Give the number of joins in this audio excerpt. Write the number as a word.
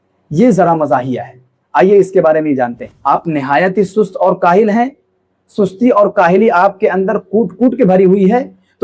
one